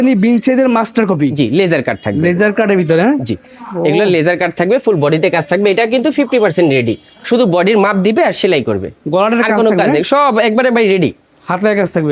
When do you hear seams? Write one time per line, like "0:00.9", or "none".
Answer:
none